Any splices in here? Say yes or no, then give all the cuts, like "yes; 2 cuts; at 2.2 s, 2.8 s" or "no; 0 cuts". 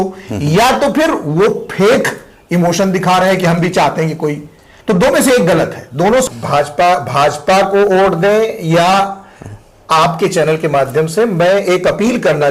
yes; 1 cut; at 6.2 s